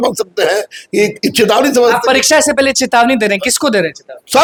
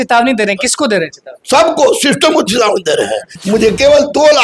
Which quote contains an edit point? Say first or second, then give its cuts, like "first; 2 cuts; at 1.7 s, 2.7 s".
second; 1 cut; at 3.3 s